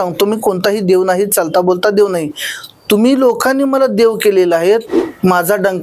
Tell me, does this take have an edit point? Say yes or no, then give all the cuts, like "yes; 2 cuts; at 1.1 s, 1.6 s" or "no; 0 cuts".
yes; 1 cut; at 4.8 s